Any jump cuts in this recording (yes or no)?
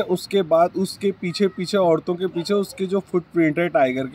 no